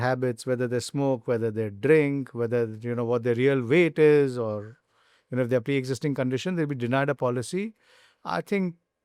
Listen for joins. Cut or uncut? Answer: uncut